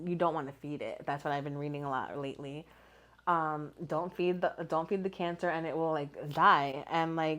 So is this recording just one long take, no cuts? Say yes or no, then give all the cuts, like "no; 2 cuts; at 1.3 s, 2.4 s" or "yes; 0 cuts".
yes; 0 cuts